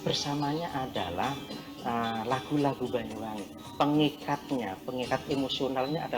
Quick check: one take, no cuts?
yes; 0 cuts

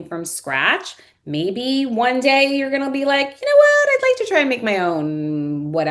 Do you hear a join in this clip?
no; 0 cuts

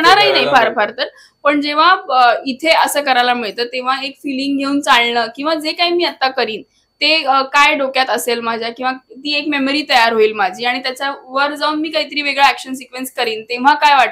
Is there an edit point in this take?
no; 0 cuts

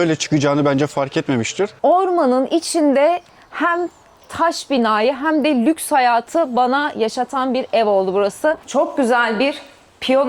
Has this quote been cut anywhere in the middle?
yes; 2 cuts; at 1.7 s, 8.6 s

